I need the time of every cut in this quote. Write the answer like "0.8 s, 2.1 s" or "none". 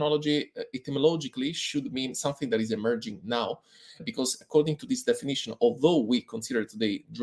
none